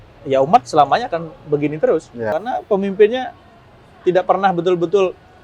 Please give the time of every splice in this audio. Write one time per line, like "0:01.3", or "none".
0:02.3